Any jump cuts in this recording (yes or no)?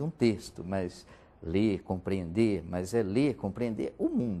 no